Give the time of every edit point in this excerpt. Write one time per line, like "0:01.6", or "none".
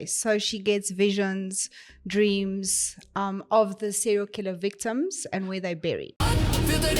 0:06.1